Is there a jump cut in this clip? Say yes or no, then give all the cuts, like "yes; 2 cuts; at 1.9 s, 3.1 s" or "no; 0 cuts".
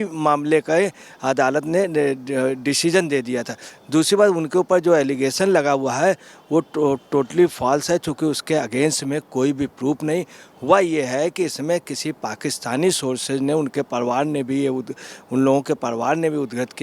no; 0 cuts